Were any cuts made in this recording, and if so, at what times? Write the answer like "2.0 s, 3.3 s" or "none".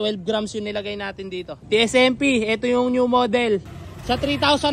1.6 s, 3.7 s

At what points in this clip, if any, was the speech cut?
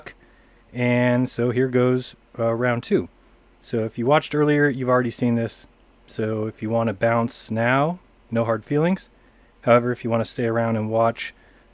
5.8 s

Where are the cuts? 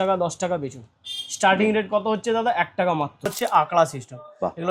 3.3 s

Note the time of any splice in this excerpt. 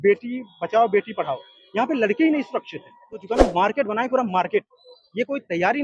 3.2 s

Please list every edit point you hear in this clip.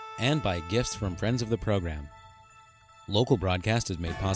none

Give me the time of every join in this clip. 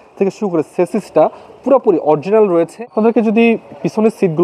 2.9 s

